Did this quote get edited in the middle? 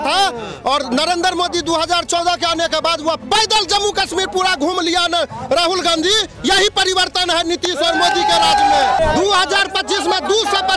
yes; 1 cut; at 9.0 s

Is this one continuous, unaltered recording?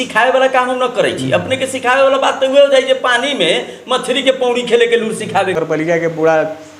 no; 1 cut; at 5.6 s

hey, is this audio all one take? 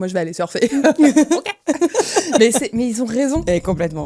yes; 0 cuts

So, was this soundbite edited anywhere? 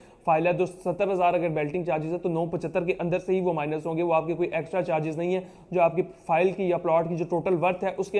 no; 0 cuts

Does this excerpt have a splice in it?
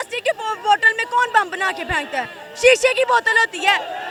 no; 0 cuts

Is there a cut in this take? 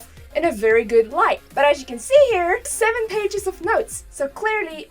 yes; 2 cuts; at 1.4 s, 2.7 s

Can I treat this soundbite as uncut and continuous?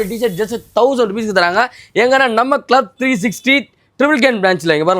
yes; 0 cuts

